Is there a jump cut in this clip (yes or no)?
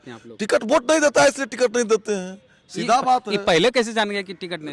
no